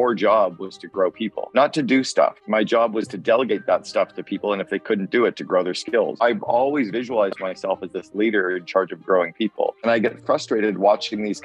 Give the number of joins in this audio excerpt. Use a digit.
3